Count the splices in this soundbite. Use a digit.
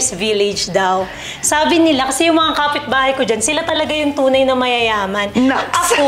0